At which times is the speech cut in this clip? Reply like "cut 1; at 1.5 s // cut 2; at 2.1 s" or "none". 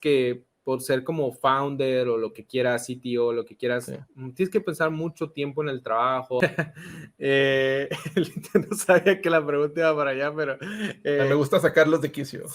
cut 1; at 6.4 s